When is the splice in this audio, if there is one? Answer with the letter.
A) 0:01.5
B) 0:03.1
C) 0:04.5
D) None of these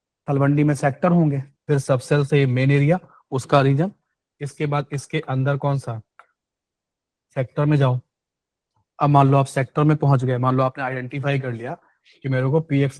A